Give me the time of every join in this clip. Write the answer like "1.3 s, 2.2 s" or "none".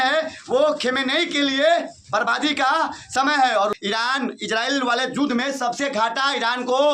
3.7 s